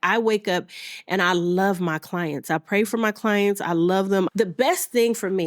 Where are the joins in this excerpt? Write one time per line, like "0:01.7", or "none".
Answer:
0:04.3